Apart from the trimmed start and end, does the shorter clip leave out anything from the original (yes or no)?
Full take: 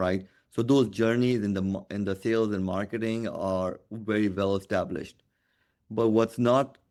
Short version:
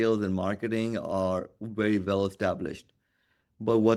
no